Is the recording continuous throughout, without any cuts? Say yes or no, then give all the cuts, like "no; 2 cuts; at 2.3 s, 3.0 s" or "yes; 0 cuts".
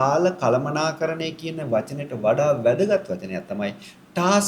yes; 0 cuts